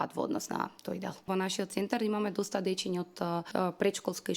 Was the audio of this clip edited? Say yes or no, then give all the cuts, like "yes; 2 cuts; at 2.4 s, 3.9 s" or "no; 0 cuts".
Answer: yes; 2 cuts; at 1.3 s, 3.5 s